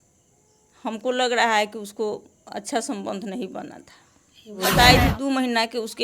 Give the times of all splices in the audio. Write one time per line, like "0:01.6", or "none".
0:04.6